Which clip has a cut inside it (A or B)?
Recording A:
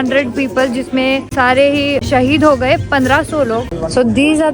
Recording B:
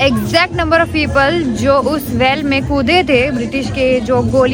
A